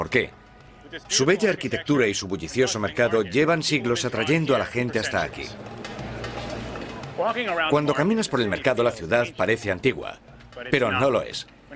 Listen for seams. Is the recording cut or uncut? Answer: cut